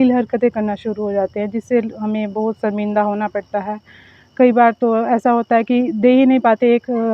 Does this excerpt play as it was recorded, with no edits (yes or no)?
yes